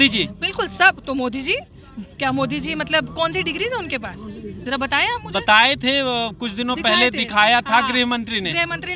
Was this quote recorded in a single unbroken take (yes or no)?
yes